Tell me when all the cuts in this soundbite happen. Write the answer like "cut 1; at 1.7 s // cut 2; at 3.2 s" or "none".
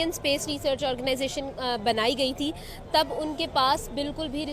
none

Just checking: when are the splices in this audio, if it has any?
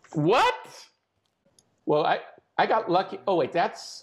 cut 1; at 1.4 s

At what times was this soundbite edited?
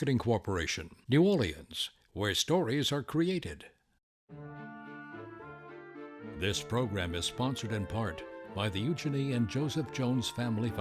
cut 1; at 4.2 s

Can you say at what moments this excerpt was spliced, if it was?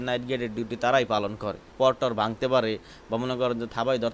cut 1; at 1.6 s

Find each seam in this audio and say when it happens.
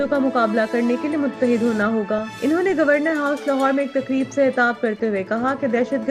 none

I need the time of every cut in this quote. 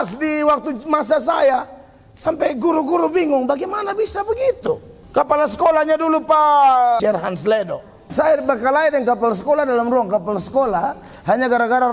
cut 1; at 4.9 s // cut 2; at 7.0 s // cut 3; at 8.1 s

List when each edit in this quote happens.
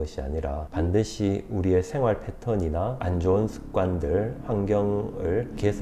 none

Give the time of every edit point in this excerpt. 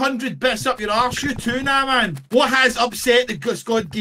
cut 1; at 2.2 s

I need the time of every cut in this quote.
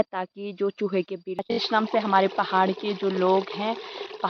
cut 1; at 1.5 s

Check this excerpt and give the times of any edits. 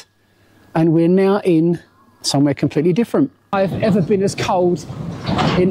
cut 1; at 3.5 s

